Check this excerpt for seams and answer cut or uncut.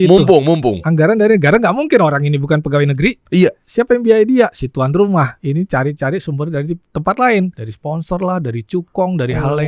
cut